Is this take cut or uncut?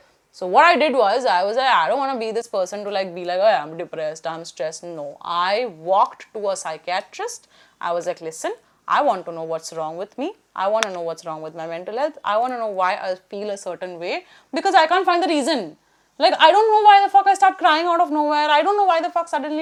uncut